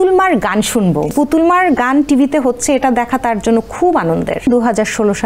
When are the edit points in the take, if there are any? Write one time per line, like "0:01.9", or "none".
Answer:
0:01.1
0:04.5